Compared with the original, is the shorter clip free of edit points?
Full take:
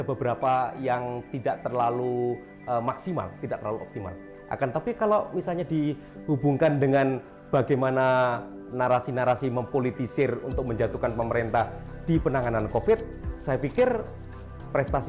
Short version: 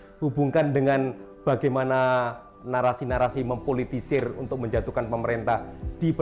yes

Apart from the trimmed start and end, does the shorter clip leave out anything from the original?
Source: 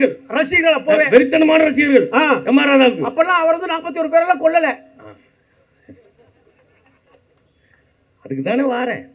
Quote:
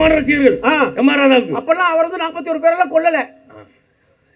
no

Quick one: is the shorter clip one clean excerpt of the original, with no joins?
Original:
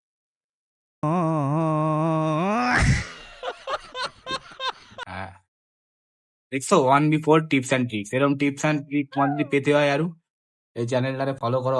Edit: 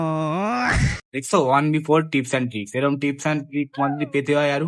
no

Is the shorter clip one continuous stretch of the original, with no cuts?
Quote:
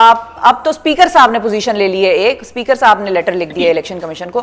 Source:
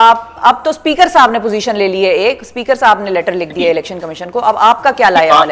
yes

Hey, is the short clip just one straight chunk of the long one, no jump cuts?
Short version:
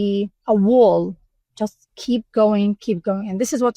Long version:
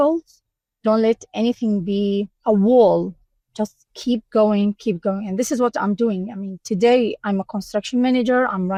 yes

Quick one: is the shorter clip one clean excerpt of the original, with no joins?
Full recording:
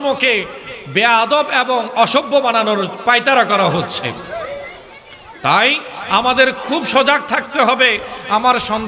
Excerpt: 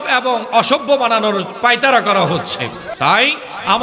no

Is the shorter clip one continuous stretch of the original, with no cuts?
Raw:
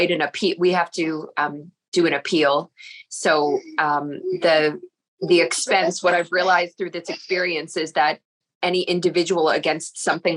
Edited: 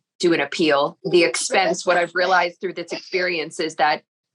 no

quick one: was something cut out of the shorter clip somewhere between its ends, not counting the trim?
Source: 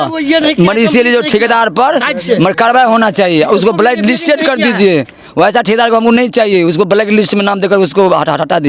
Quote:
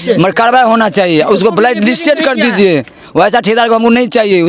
no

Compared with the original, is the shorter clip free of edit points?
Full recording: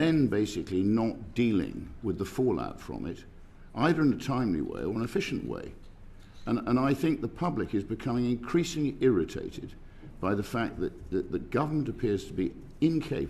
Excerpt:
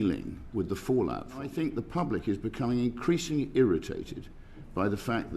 no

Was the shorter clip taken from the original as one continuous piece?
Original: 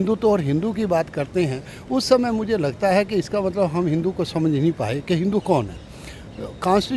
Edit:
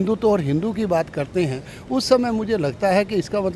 yes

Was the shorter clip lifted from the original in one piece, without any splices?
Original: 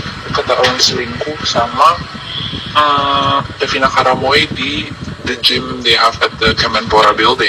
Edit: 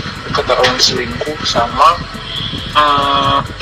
yes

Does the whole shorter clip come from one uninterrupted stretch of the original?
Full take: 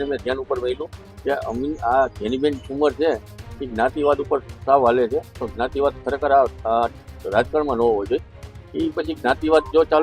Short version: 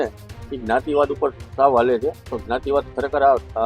yes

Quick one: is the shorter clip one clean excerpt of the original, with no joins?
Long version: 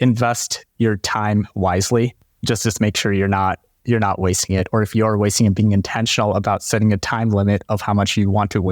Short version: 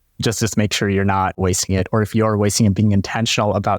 no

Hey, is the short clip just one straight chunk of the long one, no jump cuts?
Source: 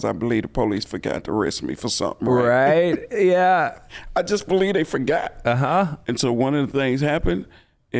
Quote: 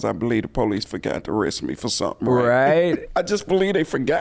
no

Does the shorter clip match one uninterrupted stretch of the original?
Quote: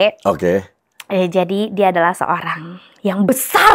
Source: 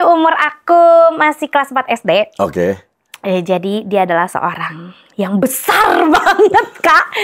yes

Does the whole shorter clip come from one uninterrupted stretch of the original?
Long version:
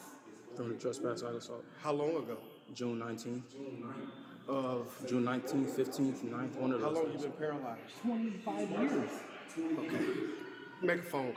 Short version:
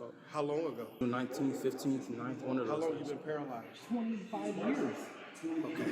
no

